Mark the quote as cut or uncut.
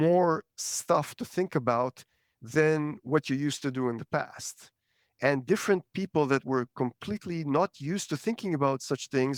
uncut